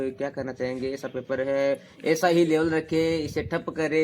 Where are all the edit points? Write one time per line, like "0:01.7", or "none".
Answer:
none